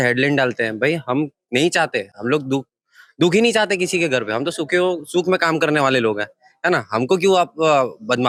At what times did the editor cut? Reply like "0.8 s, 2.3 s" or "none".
none